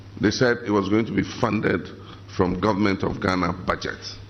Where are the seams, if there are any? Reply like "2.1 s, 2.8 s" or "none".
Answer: none